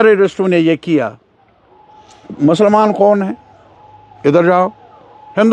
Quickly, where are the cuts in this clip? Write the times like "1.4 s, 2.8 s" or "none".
none

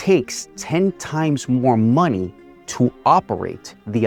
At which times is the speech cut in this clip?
none

